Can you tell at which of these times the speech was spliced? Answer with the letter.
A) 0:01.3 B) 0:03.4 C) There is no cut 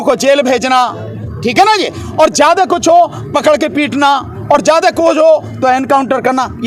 C